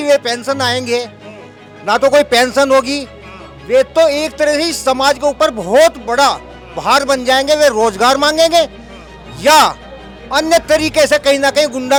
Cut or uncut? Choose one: uncut